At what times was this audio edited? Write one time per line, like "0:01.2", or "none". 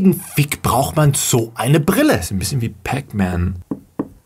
0:02.2

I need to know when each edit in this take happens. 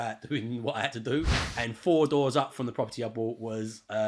0:01.3

